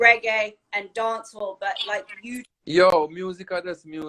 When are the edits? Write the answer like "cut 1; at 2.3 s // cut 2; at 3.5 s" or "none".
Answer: cut 1; at 2.5 s

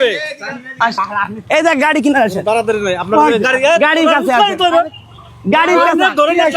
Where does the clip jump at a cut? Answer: cut 1; at 0.9 s

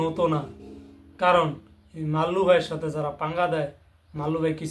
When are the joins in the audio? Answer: none

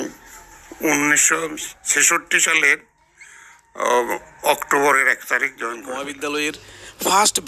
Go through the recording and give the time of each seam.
cut 1; at 6.1 s

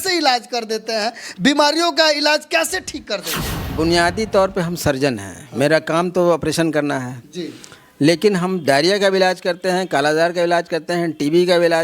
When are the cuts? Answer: cut 1; at 3.7 s

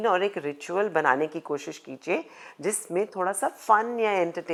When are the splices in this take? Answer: none

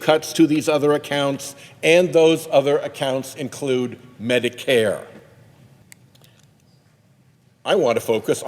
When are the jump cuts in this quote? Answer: cut 1; at 5.8 s

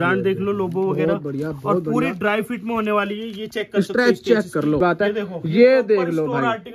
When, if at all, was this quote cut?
cut 1; at 4.8 s

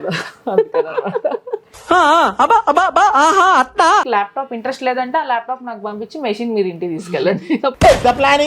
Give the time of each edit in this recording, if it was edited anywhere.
cut 1; at 4.1 s

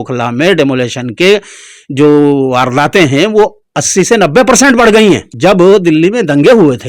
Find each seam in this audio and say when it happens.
cut 1; at 5.3 s

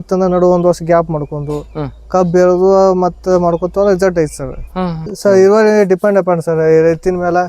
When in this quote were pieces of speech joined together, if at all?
cut 1; at 5.1 s

